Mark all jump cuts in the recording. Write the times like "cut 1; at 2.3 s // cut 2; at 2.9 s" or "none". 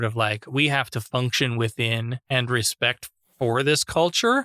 cut 1; at 2.2 s

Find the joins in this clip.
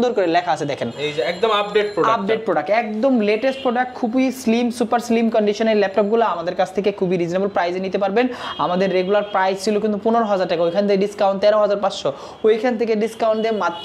none

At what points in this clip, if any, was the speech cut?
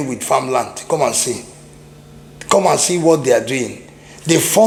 none

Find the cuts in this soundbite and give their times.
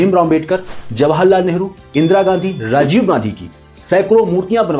none

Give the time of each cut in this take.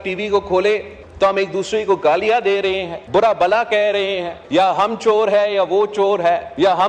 none

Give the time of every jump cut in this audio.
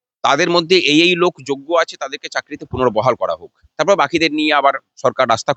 none

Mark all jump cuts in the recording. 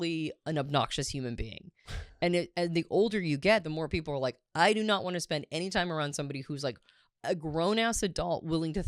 cut 1; at 3.7 s

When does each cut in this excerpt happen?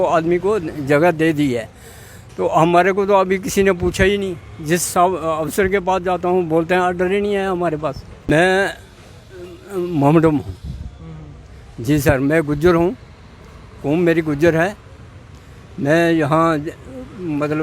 cut 1; at 8.1 s

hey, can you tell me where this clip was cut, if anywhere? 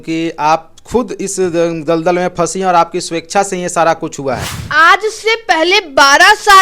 cut 1; at 4.5 s

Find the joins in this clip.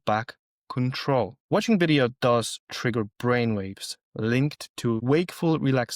cut 1; at 1.4 s // cut 2; at 5.0 s

